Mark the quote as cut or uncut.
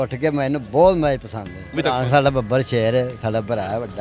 cut